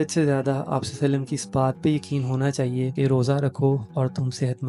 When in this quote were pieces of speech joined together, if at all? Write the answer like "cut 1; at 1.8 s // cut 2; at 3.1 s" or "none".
cut 1; at 2.9 s // cut 2; at 3.9 s